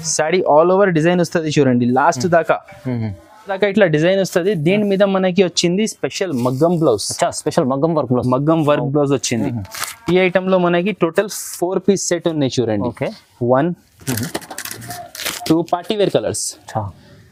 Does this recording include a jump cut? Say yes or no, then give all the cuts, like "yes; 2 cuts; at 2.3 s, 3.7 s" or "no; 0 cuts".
no; 0 cuts